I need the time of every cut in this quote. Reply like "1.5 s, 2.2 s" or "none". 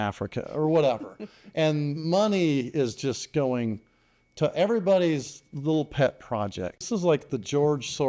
6.9 s